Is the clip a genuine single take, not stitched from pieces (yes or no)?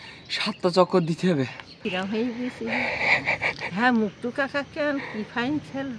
no